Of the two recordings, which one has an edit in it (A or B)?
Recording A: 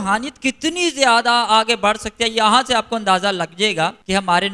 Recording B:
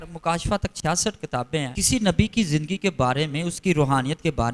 B